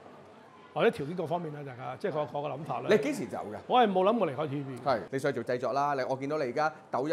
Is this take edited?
yes; 1 cut; at 5.1 s

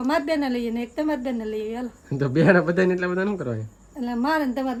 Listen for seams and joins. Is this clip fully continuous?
yes; 0 cuts

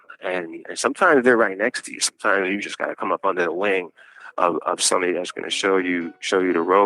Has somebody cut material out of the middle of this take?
no; 0 cuts

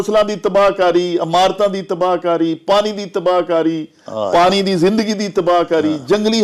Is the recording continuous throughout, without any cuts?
yes; 0 cuts

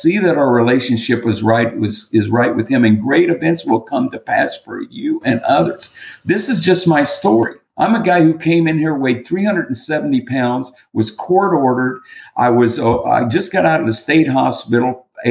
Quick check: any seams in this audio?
yes; 1 cut; at 7.6 s

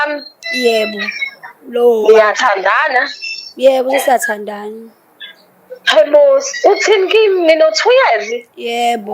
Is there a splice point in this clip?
no; 0 cuts

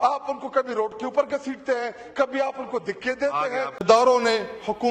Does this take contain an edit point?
yes; 1 cut; at 3.8 s

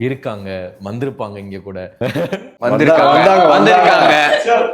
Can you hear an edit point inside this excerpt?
yes; 2 cuts; at 1.9 s, 2.5 s

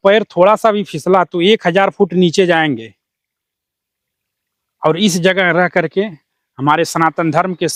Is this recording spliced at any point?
no; 0 cuts

